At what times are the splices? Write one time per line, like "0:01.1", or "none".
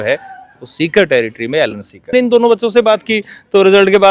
0:02.1